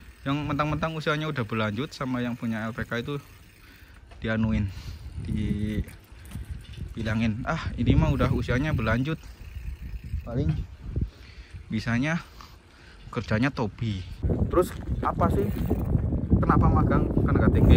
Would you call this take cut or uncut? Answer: cut